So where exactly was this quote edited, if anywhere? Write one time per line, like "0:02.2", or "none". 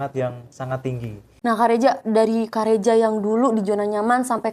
0:01.2